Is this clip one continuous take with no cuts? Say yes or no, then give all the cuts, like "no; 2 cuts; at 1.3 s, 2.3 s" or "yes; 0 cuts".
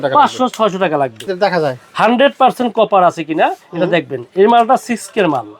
no; 1 cut; at 1.2 s